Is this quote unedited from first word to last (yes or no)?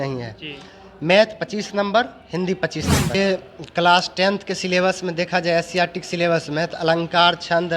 no